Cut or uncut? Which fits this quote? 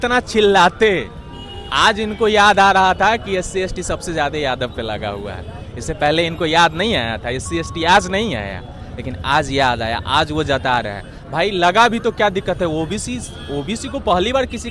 uncut